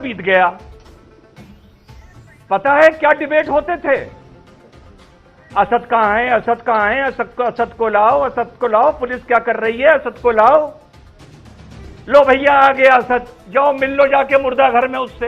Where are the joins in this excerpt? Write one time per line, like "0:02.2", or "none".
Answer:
none

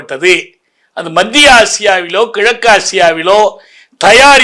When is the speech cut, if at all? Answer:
none

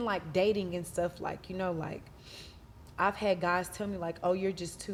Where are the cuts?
none

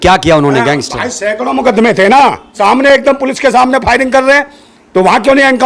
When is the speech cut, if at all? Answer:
0:02.5

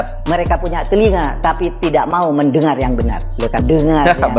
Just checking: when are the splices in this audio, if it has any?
none

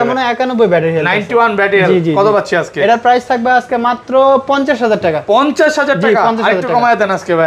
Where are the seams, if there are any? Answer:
none

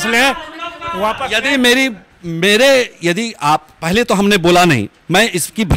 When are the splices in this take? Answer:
none

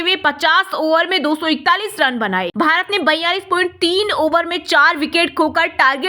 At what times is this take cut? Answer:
0:02.5

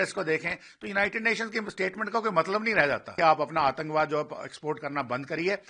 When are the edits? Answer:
0:03.1

